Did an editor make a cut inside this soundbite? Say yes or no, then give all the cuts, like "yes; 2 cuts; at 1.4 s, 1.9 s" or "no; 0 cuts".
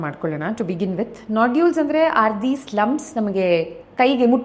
no; 0 cuts